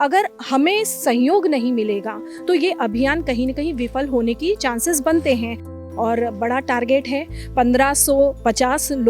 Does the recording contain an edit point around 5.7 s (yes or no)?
yes